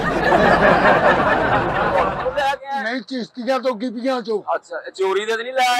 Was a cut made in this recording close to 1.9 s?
yes; 1 cut; at 1.9 s

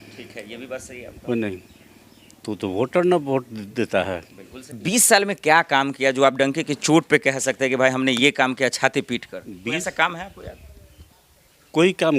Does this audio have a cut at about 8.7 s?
no; 1 cut; at 4.8 s

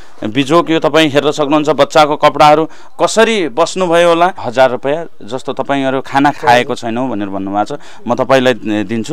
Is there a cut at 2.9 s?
no; 1 cut; at 4.4 s

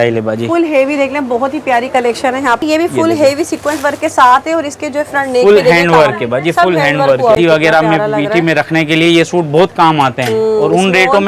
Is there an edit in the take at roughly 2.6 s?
yes; 2 cuts; at 2.6 s, 7.4 s

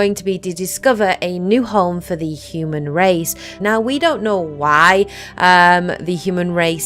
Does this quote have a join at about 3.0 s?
yes; 1 cut; at 3.0 s

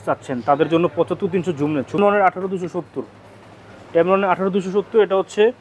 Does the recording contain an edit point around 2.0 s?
yes; 1 cut; at 2.0 s

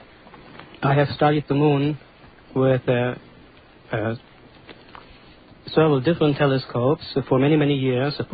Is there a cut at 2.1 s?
no; 1 cut; at 6.2 s

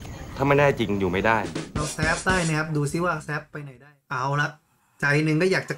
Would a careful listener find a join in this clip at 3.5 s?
yes; 1 cut; at 3.5 s

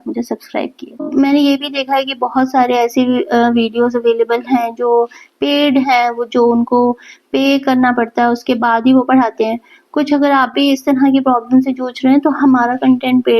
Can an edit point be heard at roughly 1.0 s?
yes; 1 cut; at 1.0 s

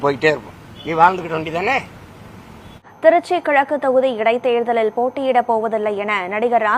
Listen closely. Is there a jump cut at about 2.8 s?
yes; 1 cut; at 2.8 s

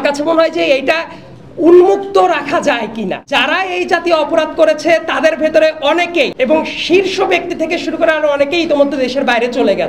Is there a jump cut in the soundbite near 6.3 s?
yes; 2 cuts; at 3.2 s, 6.3 s

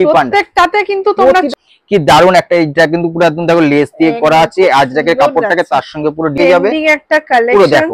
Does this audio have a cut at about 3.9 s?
no; 2 cuts; at 1.5 s, 6.3 s

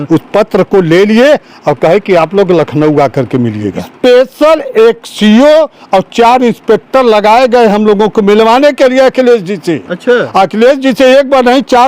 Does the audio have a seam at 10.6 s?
no; 1 cut; at 3.9 s

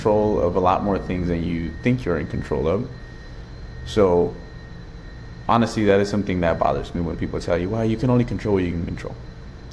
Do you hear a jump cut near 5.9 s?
no; 0 cuts

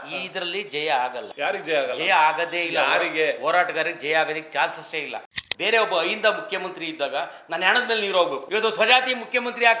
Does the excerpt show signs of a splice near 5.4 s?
yes; 3 cuts; at 1.3 s, 5.4 s, 8.4 s

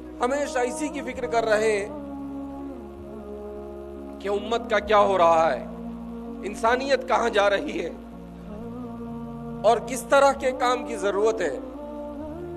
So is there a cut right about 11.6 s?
yes; 3 cuts; at 7.9 s, 9.3 s, 11.6 s

